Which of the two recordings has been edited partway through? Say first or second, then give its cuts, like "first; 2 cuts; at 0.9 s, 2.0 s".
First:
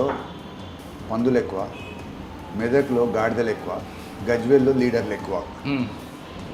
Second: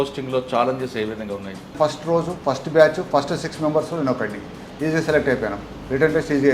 second; 1 cut; at 1.8 s